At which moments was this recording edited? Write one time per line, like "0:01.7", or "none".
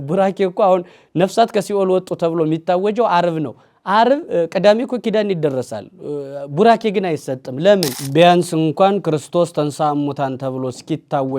0:08.0